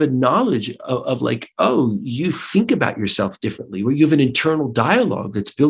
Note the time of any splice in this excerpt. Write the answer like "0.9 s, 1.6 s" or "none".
none